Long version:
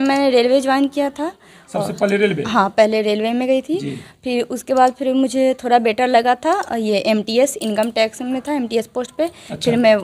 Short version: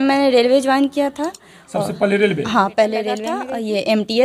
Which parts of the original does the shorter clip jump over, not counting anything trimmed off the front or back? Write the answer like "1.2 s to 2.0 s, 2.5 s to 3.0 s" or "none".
3.3 s to 6.5 s